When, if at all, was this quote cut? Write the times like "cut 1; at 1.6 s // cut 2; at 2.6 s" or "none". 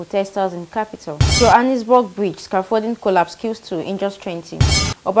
cut 1; at 1.2 s